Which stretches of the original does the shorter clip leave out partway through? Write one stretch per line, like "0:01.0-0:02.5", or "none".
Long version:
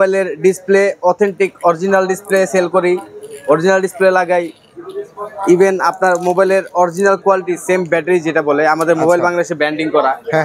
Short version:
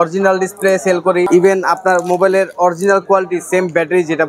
0:03.0-0:05.4

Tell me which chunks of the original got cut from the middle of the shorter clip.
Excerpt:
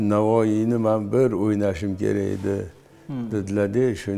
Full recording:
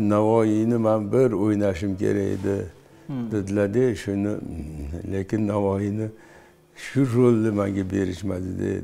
none

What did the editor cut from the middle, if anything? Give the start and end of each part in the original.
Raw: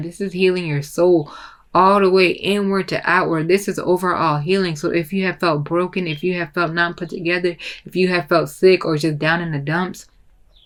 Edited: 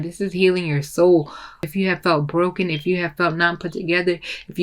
0:01.7-0:05.0

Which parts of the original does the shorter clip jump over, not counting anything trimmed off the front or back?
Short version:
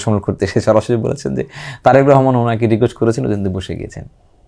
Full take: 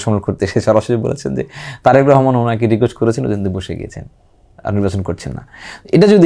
none

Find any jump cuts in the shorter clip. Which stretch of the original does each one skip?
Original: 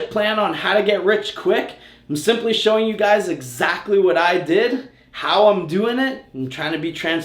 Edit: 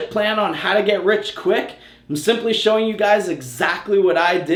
none

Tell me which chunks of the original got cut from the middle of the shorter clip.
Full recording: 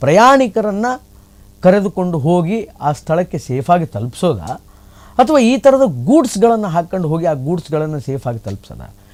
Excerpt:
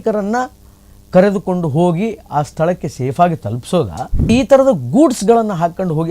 0:04.8-0:05.4

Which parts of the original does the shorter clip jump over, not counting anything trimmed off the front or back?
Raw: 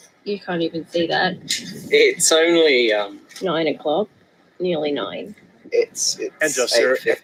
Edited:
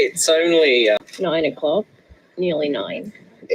0:03.1-0:03.3

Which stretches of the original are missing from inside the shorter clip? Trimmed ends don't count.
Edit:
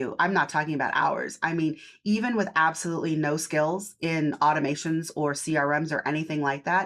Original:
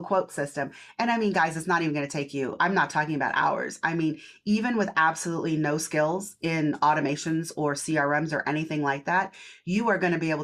none

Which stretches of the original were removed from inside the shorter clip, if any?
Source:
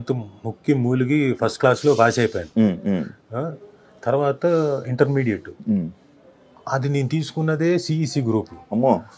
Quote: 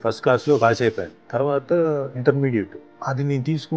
0:02.4-0:03.8
0:05.5-0:06.4

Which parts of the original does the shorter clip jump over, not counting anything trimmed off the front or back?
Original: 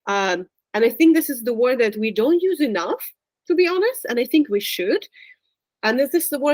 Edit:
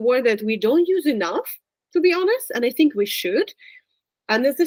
none

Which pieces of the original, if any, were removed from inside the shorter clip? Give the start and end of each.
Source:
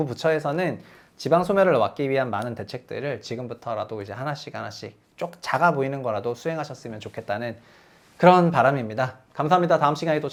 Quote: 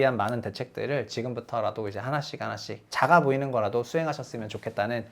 0:05.0-0:05.4

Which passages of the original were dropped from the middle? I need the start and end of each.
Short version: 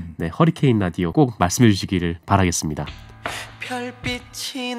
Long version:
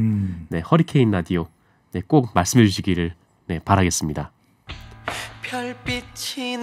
0:01.4-0:02.1
0:03.2-0:03.6
0:04.4-0:04.9

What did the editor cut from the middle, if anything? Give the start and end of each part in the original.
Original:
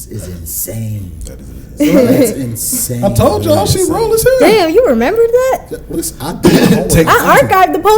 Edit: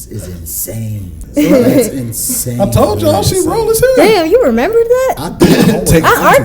0:01.2-0:01.6
0:05.7-0:06.3

